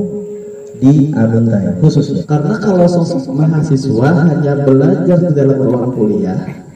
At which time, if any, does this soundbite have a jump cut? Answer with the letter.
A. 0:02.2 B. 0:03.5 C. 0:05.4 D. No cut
A